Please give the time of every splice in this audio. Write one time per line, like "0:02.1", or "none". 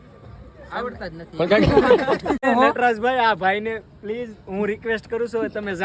0:02.4

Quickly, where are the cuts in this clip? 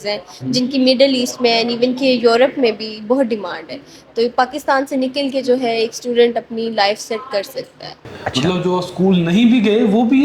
0:08.0

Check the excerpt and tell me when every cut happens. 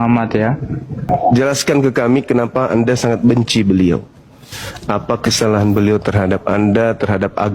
0:01.1

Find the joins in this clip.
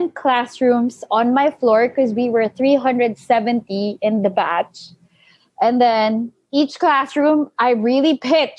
none

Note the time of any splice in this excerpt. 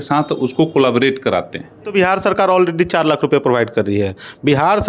0:01.9

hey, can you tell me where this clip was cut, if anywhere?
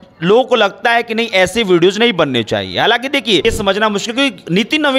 0:03.4

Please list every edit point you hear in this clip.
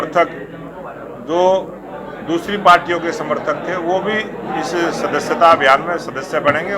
none

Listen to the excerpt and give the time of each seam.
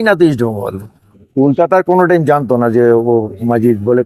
0:01.2

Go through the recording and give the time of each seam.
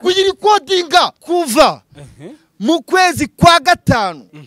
0:01.2

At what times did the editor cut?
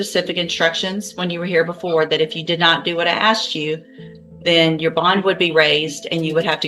none

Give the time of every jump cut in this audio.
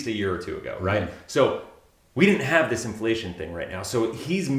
none

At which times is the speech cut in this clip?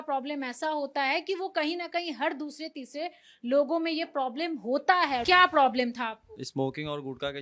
0:05.2
0:06.4

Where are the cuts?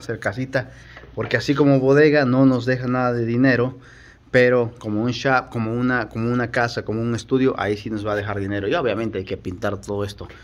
none

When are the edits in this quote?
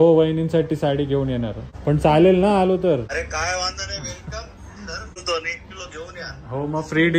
0:01.6
0:03.1
0:05.2

